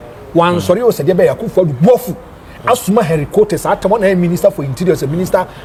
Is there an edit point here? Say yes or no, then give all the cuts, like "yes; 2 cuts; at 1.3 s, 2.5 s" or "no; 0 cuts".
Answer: no; 0 cuts